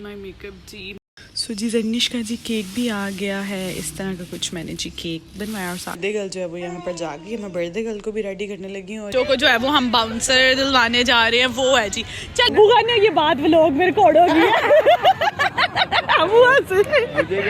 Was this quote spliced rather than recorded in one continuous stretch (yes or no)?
yes